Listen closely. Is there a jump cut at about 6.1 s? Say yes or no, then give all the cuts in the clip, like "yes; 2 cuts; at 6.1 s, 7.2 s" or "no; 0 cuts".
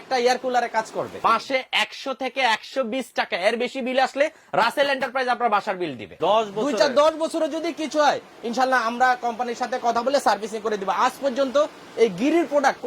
yes; 2 cuts; at 1.2 s, 6.1 s